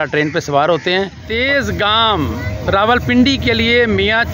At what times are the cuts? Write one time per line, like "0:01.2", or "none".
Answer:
0:01.4